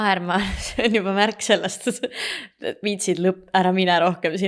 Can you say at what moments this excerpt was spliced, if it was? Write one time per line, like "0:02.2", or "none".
none